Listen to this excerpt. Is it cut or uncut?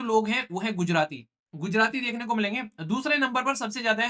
uncut